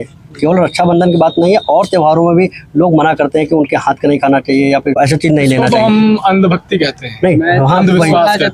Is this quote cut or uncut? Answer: cut